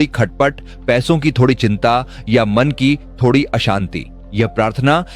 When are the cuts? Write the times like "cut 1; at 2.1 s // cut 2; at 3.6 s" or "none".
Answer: none

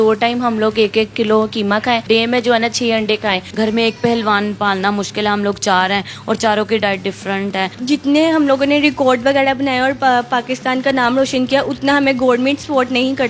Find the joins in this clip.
cut 1; at 2.0 s // cut 2; at 3.5 s // cut 3; at 7.8 s

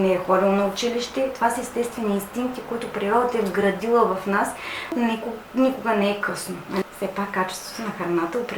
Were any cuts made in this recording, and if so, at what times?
cut 1; at 4.9 s // cut 2; at 6.8 s

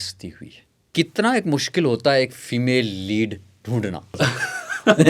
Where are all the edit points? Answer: cut 1; at 0.9 s // cut 2; at 4.2 s

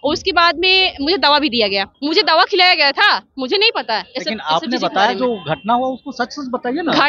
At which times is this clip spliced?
cut 1; at 1.9 s

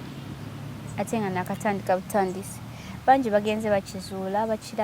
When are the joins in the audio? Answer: none

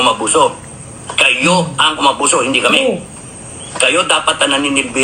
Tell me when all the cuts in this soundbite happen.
none

